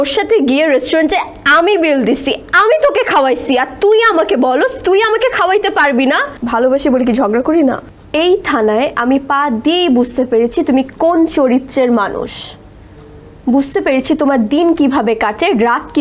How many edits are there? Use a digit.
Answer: 2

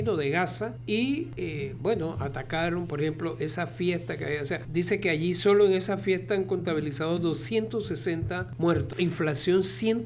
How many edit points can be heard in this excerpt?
4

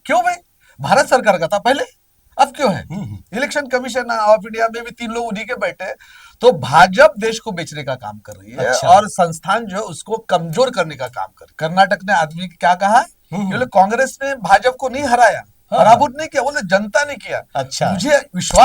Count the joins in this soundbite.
1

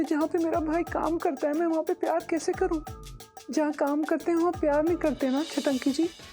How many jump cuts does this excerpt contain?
0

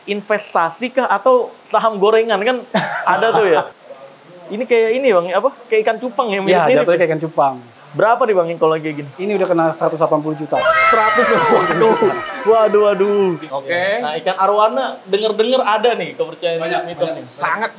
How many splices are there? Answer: 2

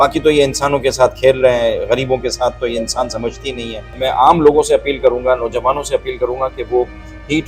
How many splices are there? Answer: 1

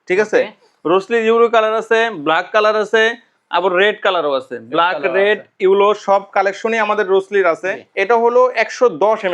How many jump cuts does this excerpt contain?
1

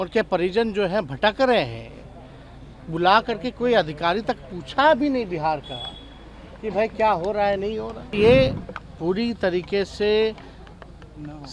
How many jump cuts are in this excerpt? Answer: 1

